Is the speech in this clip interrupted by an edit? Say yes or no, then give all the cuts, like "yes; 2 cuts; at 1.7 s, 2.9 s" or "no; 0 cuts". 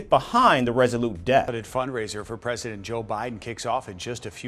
yes; 1 cut; at 1.6 s